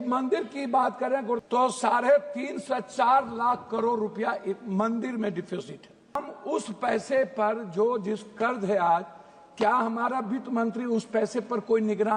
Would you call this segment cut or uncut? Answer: cut